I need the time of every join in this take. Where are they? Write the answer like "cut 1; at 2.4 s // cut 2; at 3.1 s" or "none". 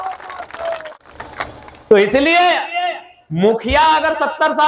cut 1; at 0.9 s